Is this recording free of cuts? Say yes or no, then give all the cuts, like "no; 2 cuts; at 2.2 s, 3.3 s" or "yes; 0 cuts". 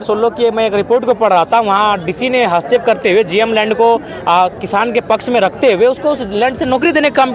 yes; 0 cuts